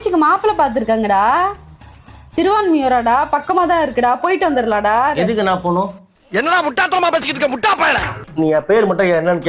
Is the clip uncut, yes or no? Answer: no